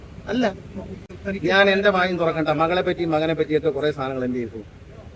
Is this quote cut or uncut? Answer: cut